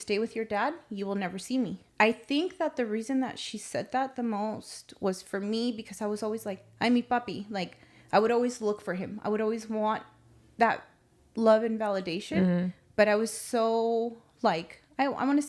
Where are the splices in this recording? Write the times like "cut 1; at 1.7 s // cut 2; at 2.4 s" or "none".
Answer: cut 1; at 1.8 s